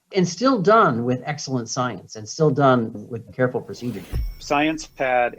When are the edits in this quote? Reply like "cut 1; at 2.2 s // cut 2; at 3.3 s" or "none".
cut 1; at 4.0 s